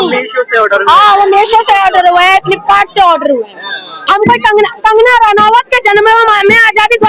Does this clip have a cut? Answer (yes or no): yes